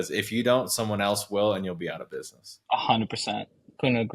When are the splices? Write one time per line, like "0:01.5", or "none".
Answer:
none